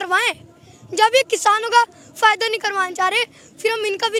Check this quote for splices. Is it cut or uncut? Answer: uncut